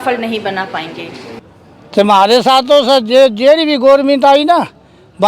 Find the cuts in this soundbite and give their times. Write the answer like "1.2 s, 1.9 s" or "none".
1.4 s